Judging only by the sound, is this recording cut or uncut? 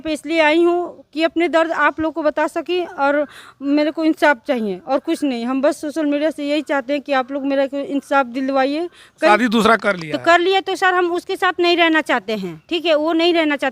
cut